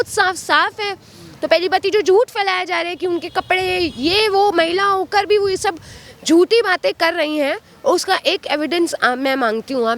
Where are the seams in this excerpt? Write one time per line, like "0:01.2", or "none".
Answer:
none